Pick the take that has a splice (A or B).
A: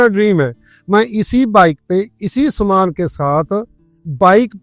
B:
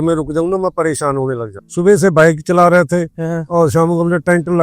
B